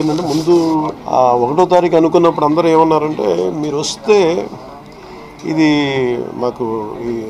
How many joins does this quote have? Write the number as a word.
one